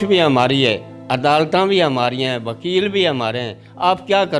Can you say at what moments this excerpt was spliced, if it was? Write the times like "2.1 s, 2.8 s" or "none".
none